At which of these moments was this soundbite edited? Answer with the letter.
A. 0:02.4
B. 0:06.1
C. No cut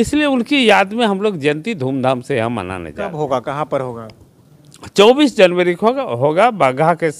C